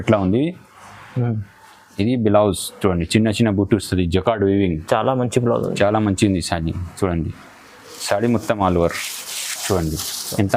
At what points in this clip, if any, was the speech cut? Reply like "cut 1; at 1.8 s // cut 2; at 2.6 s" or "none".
none